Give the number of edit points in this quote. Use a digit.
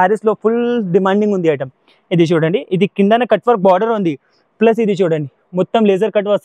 0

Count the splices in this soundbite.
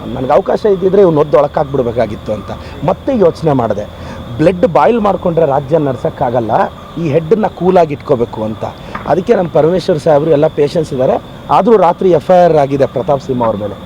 0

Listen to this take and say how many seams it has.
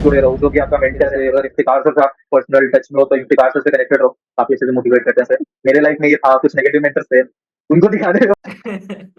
2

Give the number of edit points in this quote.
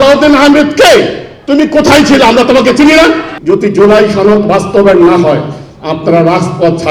1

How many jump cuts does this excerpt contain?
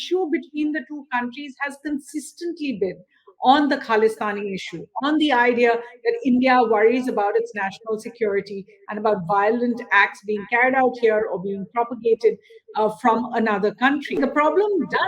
1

